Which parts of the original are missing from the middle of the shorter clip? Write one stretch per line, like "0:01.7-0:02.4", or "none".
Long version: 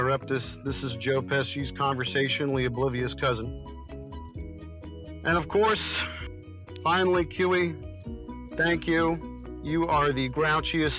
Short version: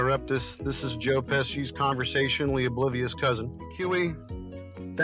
0:03.7-0:07.3

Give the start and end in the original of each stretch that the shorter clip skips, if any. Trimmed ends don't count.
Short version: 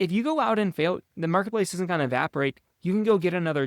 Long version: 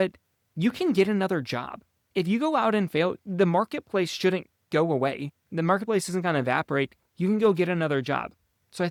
0:03.2-0:05.4

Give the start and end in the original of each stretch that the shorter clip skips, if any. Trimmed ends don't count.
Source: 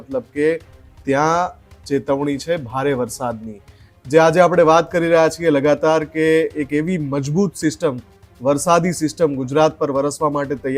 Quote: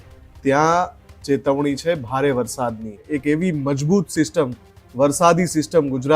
0:03.7-0:06.6

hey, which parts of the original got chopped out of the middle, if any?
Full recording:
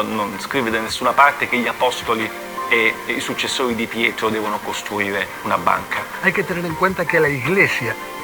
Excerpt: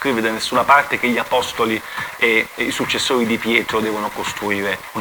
none

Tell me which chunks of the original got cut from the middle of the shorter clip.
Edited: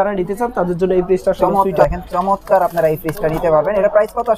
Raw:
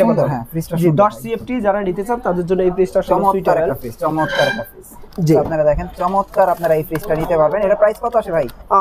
0:03.5-0:05.7

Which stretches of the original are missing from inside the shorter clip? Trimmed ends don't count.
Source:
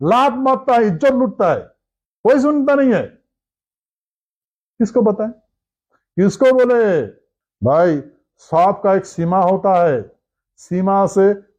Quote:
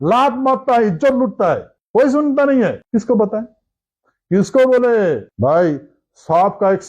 0:01.7-0:02.0
0:03.1-0:04.7
0:07.1-0:07.5

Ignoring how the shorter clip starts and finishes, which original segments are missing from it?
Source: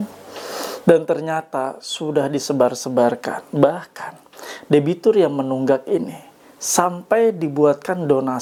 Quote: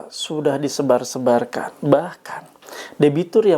none

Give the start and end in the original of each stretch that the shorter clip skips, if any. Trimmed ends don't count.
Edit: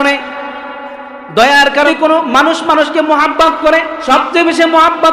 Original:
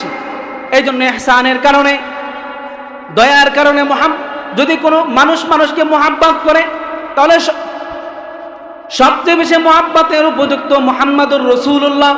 0:03.7-0:04.7
0:06.8-0:08.9

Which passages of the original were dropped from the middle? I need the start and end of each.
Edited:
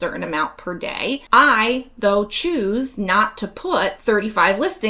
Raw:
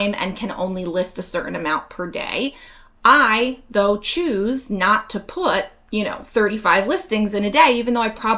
0:02.6-0:03.0
0:05.7-0:06.3

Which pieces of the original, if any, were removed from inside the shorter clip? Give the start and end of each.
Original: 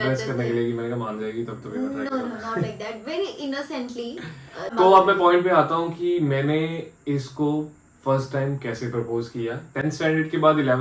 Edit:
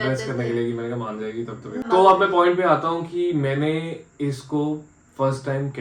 0:01.8-0:04.7

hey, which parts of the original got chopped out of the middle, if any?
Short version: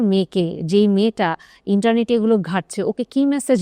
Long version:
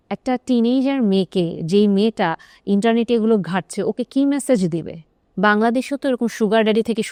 none

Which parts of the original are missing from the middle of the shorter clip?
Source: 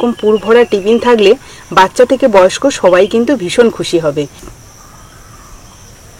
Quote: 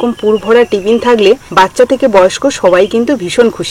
0:01.5-0:01.7

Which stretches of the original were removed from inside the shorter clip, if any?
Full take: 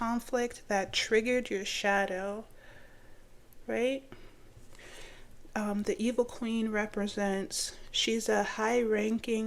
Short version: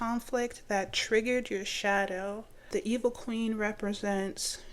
0:02.7-0:05.8

